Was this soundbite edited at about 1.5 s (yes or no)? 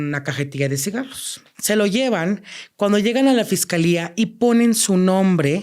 yes